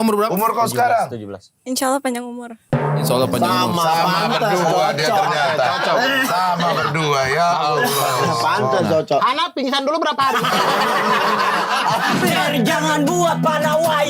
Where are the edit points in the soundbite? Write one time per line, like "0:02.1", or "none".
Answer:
0:12.2